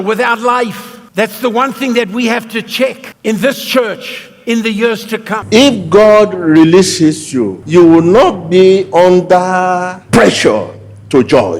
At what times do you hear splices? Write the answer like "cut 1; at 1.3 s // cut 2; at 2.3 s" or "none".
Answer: cut 1; at 5.3 s